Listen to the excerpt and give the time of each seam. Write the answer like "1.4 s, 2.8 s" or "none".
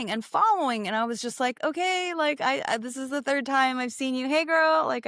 none